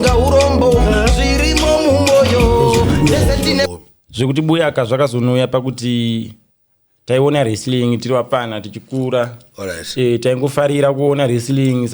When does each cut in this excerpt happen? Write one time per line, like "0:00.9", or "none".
0:03.7

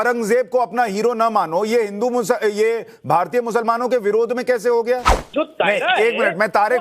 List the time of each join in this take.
0:05.2

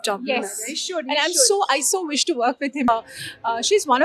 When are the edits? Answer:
0:02.9

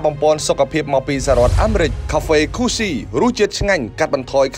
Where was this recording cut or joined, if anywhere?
0:02.0

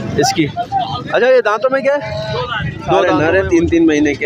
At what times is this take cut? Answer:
0:03.0

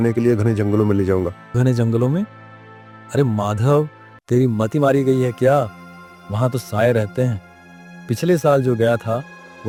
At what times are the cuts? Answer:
none

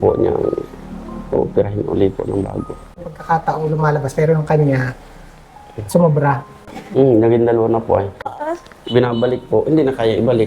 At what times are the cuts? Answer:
0:03.0
0:08.2

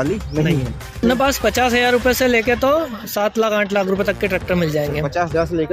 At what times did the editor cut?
0:01.0

